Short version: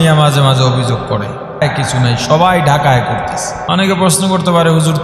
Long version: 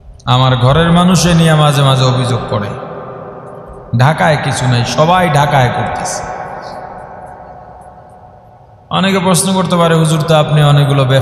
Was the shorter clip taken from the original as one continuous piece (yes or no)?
no